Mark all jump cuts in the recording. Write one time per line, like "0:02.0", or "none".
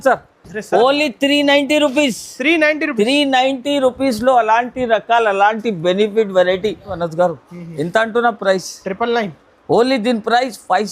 0:07.0